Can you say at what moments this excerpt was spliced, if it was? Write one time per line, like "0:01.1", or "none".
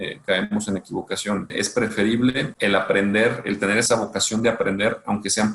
0:01.5
0:02.5
0:03.9